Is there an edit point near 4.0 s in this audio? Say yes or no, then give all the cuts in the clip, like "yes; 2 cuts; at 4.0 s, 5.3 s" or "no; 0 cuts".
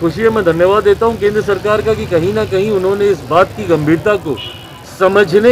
yes; 1 cut; at 4.0 s